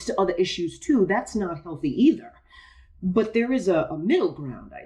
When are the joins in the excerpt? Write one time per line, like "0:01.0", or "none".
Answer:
0:03.9